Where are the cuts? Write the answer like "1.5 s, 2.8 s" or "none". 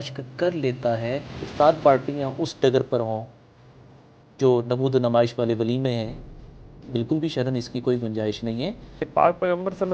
1.4 s, 8.9 s